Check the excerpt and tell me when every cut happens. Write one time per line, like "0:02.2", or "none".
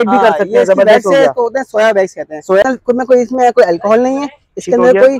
0:02.6